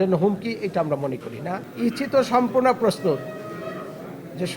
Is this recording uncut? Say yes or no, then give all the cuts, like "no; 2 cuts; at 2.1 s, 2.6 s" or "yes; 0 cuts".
no; 1 cut; at 1.7 s